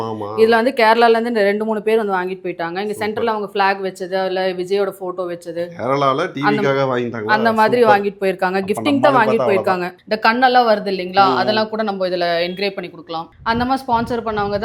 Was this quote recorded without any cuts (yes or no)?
no